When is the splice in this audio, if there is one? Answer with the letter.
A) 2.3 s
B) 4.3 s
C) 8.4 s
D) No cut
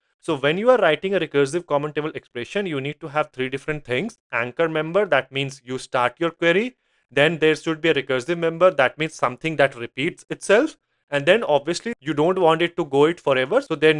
D